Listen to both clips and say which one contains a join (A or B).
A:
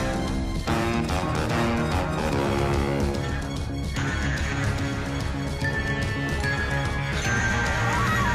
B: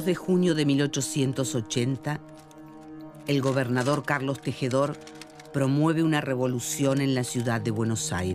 A